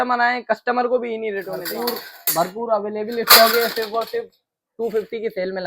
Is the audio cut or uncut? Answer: cut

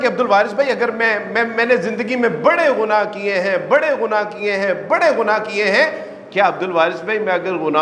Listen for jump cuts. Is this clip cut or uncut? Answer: uncut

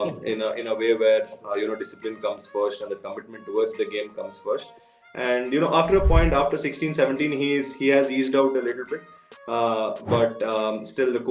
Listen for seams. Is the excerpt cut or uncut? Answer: uncut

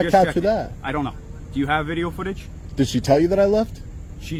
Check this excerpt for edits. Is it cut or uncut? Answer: uncut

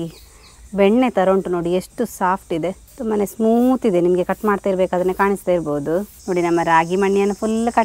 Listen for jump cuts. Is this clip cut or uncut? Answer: cut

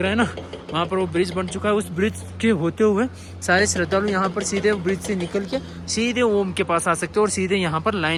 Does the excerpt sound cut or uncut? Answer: uncut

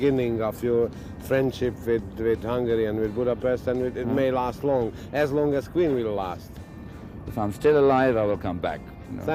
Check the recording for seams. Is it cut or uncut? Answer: uncut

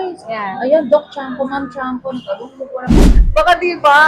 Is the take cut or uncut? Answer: cut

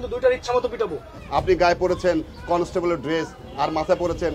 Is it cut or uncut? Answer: cut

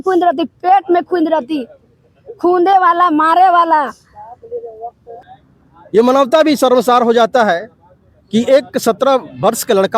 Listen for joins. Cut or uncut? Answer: cut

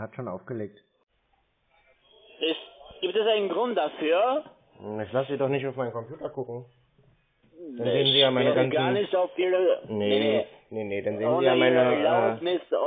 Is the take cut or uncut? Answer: cut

